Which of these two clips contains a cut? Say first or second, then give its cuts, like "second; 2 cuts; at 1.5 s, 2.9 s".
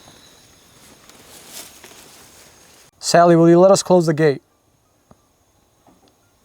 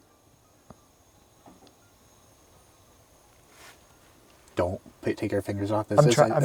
first; 1 cut; at 2.9 s